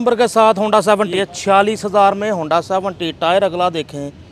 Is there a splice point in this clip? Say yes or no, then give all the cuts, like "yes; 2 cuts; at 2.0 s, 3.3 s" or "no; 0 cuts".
yes; 1 cut; at 1.1 s